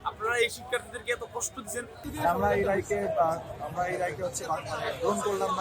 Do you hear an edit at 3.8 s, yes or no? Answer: no